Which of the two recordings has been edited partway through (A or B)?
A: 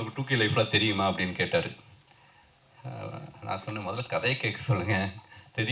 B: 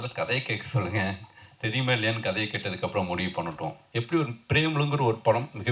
B